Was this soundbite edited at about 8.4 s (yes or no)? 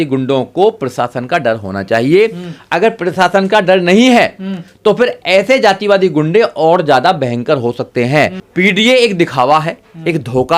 yes